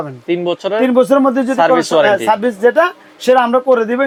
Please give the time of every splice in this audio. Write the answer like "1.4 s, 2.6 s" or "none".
none